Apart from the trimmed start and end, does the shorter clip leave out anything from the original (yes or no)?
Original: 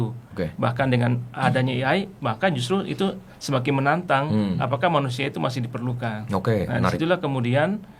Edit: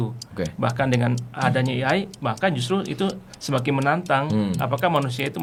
no